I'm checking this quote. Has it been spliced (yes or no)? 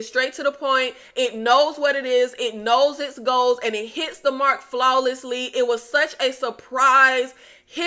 no